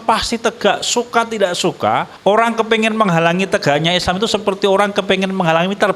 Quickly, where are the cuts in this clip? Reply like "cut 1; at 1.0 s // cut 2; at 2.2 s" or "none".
cut 1; at 2.1 s